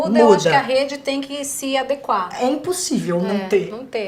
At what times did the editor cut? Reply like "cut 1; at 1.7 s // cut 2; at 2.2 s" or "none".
none